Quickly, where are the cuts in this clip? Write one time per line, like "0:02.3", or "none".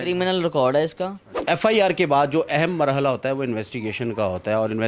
0:01.3